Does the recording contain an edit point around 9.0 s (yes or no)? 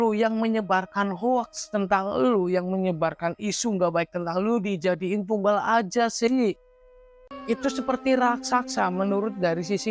no